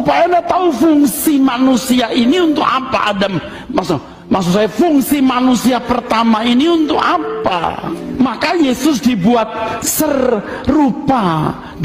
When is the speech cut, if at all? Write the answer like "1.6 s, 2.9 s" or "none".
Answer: 7.9 s